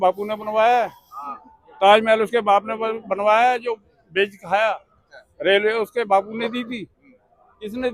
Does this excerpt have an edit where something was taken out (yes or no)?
no